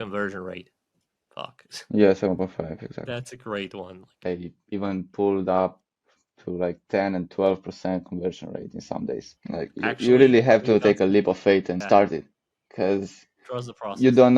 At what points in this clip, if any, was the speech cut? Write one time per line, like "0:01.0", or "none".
0:04.2
0:09.3
0:11.8